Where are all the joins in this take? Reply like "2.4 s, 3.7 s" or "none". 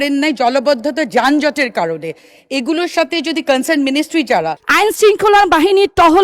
4.6 s